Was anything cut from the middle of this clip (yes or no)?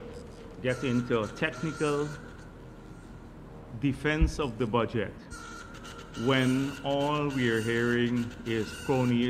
no